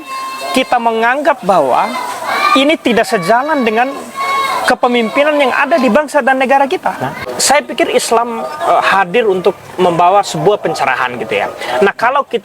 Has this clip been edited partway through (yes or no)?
yes